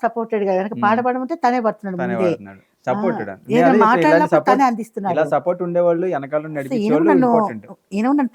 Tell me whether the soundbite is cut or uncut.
uncut